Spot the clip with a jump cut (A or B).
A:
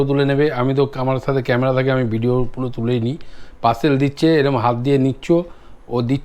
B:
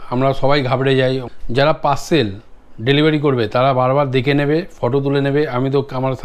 B